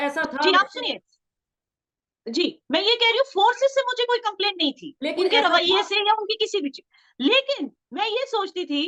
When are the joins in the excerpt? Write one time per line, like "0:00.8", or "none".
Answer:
none